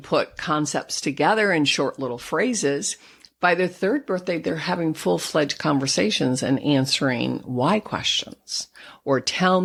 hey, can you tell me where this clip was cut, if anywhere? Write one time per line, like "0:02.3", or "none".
none